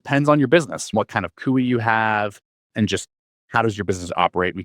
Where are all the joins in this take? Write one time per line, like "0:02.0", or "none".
0:00.9
0:02.6